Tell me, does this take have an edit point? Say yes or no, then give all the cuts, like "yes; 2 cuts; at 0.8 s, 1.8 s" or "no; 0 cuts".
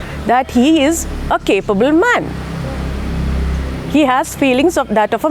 no; 0 cuts